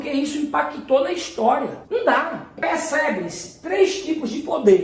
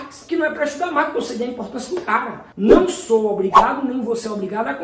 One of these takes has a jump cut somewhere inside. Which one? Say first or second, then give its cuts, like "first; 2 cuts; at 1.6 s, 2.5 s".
first; 1 cut; at 1.8 s